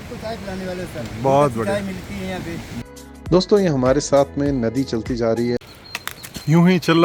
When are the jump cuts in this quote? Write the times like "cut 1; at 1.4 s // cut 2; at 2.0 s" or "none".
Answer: cut 1; at 2.8 s // cut 2; at 5.6 s